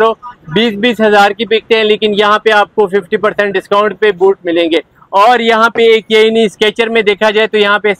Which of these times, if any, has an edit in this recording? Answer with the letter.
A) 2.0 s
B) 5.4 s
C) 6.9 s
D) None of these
D